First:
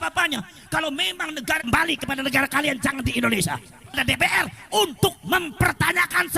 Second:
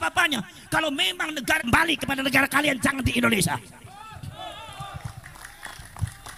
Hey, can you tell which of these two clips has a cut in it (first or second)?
first